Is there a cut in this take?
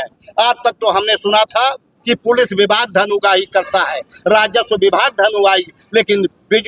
no; 0 cuts

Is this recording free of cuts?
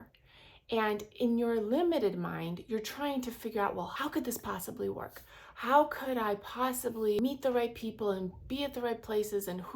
no; 2 cuts; at 3.9 s, 7.2 s

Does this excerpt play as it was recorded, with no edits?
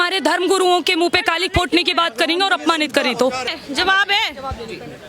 yes; 0 cuts

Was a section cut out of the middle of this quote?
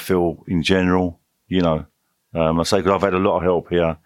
no; 0 cuts

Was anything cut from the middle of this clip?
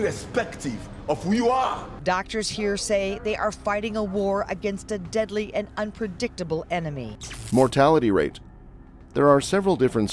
no; 0 cuts

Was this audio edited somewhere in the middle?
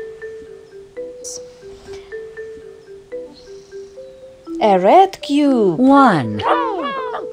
yes; 2 cuts; at 1.3 s, 3.3 s

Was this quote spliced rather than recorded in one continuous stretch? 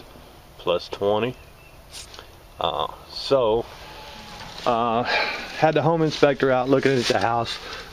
yes; 1 cut; at 1.4 s

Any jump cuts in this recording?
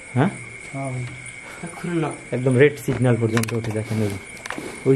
no; 0 cuts

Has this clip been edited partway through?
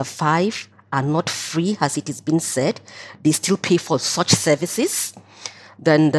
no; 0 cuts

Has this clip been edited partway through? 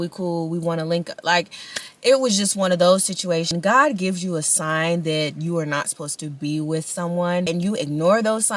yes; 2 cuts; at 3.5 s, 7.5 s

